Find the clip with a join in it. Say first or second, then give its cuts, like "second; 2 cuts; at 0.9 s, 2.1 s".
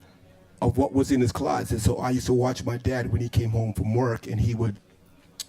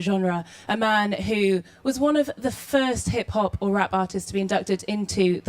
second; 1 cut; at 4.2 s